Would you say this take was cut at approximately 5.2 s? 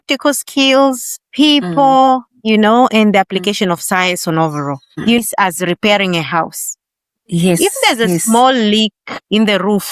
yes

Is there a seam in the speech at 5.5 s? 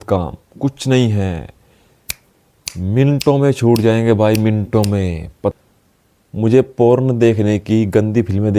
yes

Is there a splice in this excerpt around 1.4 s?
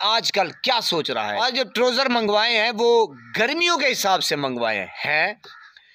yes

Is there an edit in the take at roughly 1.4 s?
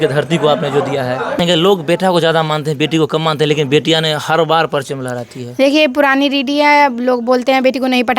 yes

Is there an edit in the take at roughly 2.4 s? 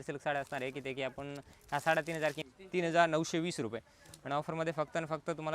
yes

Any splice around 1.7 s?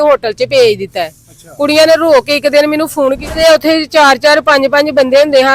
no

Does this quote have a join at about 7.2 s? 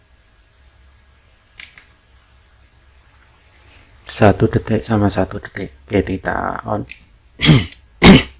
no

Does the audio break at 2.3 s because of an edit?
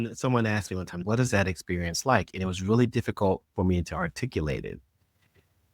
no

